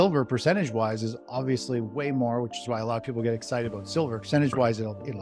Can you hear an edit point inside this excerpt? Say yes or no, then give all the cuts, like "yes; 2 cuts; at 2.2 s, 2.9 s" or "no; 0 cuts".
yes; 1 cut; at 4.2 s